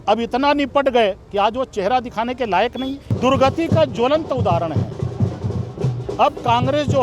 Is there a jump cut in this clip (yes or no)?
yes